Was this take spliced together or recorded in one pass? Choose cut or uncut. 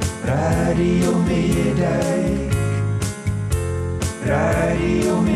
uncut